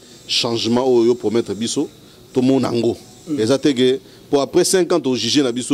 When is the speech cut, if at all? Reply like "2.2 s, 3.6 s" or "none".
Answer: none